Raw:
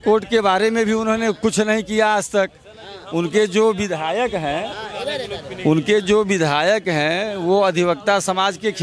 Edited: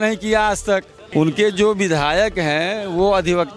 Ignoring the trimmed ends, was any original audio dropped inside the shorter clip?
yes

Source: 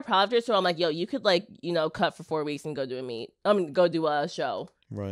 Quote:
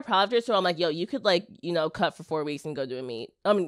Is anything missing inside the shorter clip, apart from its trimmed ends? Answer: no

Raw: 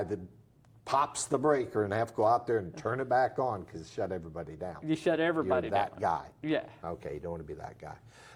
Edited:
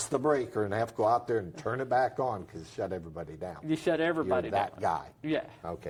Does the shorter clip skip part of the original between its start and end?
no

